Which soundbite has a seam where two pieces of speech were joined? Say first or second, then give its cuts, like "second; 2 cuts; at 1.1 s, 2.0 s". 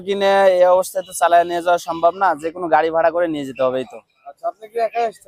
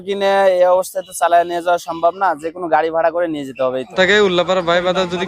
second; 1 cut; at 3.9 s